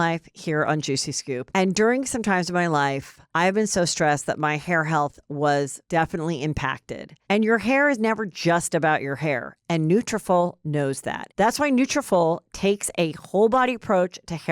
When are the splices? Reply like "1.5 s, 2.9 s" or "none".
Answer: 11.2 s